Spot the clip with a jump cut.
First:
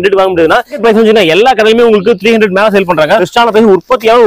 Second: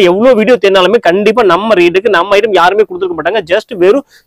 first; 2 cuts; at 0.9 s, 3.3 s

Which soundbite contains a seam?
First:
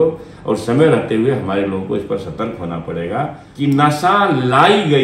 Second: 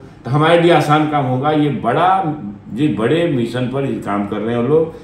first; 1 cut; at 3.4 s

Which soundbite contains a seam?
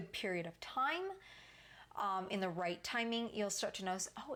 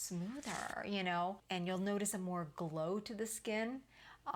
second; 1 cut; at 1.4 s

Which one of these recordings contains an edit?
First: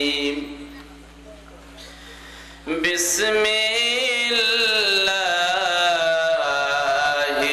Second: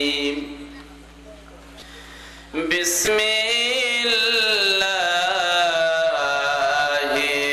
second; 2 cuts; at 1.8 s, 3.1 s

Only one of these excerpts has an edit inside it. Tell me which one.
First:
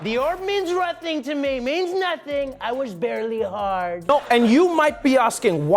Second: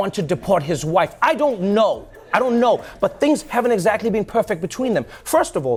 first; 1 cut; at 4.0 s

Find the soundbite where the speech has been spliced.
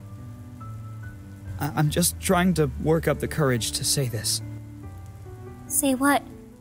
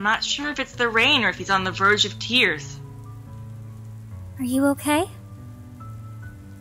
first; 1 cut; at 5.4 s

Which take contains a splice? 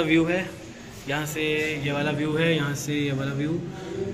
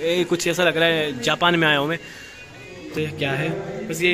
second; 1 cut; at 2.9 s

